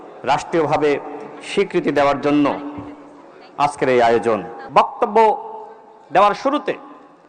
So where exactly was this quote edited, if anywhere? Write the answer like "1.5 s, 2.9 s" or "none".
4.5 s